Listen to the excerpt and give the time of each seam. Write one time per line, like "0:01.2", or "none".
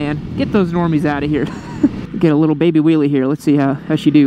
0:02.0